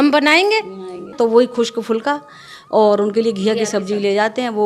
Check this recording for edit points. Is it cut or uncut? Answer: cut